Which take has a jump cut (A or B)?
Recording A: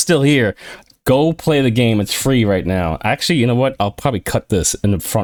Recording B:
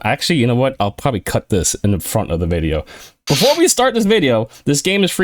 B